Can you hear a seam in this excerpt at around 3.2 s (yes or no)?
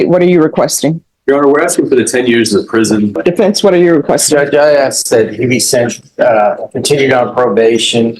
yes